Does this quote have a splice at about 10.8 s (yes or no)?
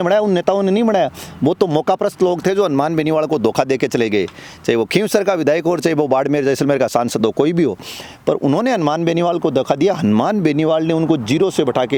no